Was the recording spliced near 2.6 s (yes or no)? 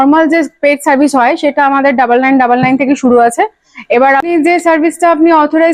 no